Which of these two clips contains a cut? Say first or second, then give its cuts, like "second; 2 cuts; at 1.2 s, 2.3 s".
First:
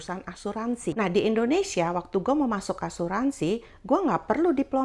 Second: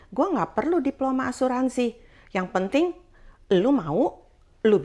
first; 1 cut; at 0.9 s